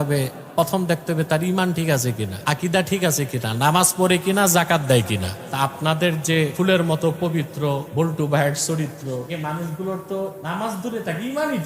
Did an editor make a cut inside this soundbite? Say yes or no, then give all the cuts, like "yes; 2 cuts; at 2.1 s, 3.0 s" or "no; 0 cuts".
yes; 6 cuts; at 2.3 s, 5.4 s, 6.5 s, 7.9 s, 9.3 s, 10.4 s